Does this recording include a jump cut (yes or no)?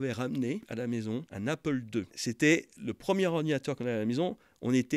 yes